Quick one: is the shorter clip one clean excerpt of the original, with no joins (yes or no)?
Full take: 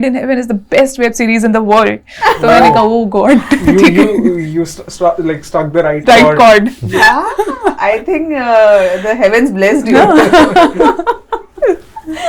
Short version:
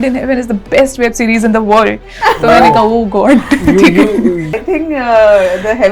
no